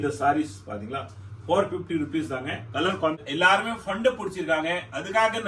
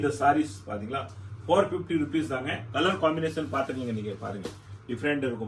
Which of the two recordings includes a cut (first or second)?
first